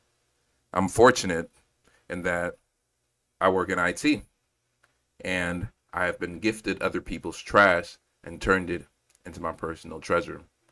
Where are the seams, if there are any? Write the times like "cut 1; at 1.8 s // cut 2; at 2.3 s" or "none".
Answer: none